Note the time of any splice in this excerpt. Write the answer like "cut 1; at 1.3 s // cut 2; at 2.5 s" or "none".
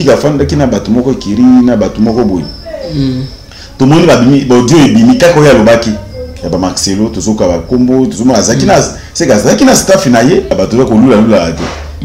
cut 1; at 10.5 s